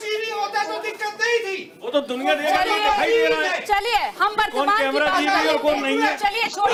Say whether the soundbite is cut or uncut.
uncut